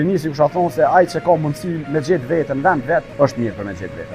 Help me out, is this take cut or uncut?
cut